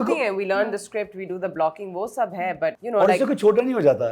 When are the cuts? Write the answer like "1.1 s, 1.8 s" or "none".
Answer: 2.8 s